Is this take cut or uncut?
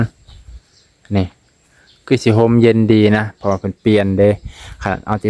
uncut